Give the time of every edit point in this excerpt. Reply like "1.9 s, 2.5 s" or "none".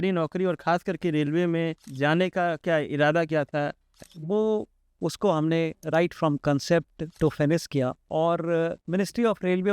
1.8 s, 3.9 s, 7.0 s, 8.0 s, 8.8 s